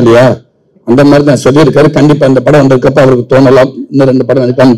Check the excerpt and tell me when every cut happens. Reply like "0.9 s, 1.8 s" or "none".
none

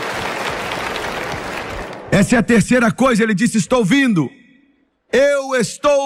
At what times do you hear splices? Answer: none

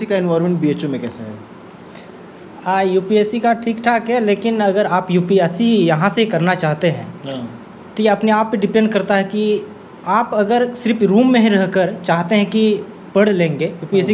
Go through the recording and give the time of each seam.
none

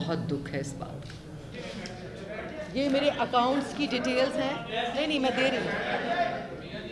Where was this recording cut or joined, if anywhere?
1.5 s

